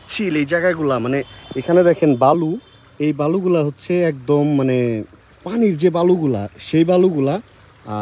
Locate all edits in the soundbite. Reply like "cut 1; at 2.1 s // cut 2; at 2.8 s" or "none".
none